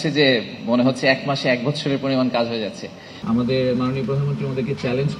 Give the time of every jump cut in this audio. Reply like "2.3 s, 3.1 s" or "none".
3.0 s